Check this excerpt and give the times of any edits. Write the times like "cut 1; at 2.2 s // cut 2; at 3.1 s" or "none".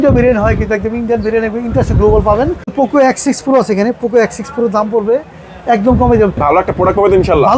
cut 1; at 2.7 s // cut 2; at 6.4 s